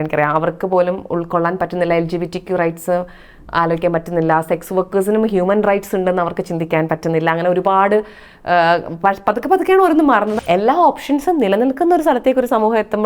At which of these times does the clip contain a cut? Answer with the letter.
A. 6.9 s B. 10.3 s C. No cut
B